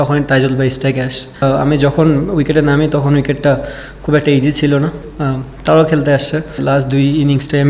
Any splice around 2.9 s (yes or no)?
no